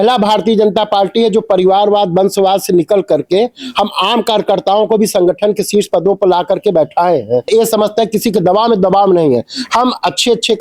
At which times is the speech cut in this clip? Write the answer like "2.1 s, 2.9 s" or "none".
none